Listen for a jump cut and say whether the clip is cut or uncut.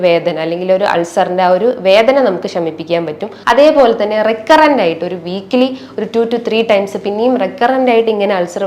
cut